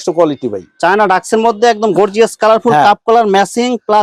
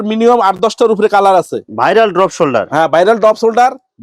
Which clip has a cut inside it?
second; 1 cut; at 1.7 s

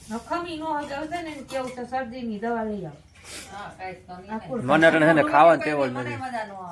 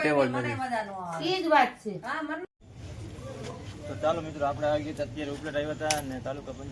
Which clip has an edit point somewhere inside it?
second; 1 cut; at 2.4 s

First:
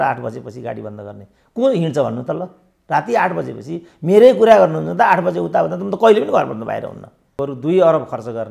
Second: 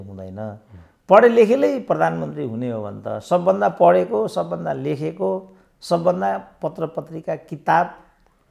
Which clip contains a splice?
first; 1 cut; at 7.3 s

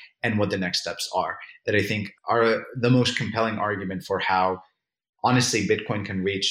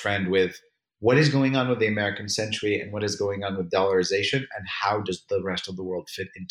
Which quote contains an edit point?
first; 1 cut; at 2.1 s

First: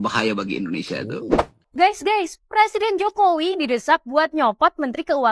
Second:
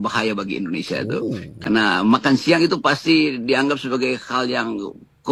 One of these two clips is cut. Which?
first; 1 cut; at 1.4 s

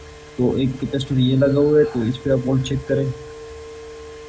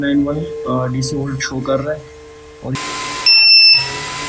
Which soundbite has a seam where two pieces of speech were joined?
second; 1 cut; at 2.8 s

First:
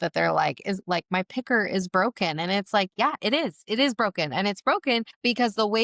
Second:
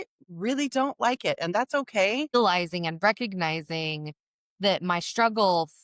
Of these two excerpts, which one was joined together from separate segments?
second; 1 cut; at 2.3 s

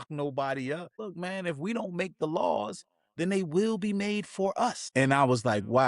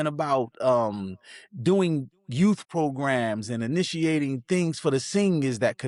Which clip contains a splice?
first; 2 cuts; at 1.0 s, 4.8 s

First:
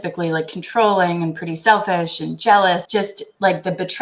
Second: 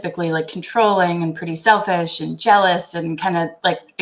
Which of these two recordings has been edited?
first; 1 cut; at 2.8 s

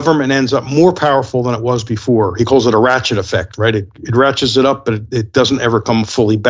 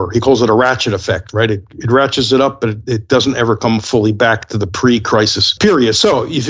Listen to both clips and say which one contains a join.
second; 1 cut; at 5.5 s

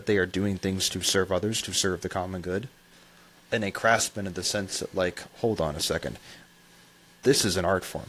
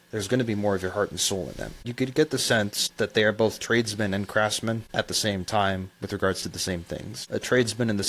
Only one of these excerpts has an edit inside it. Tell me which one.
second; 4 cuts; at 1.9 s, 2.8 s, 4.9 s, 7.1 s

